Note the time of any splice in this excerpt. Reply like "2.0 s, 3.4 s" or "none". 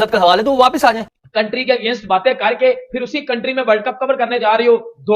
1.1 s